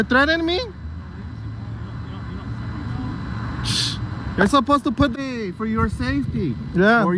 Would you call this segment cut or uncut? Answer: cut